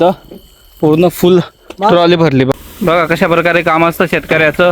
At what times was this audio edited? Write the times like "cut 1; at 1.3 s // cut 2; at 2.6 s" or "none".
cut 1; at 2.5 s